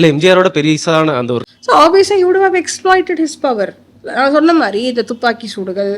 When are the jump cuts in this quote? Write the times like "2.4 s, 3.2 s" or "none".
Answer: 1.4 s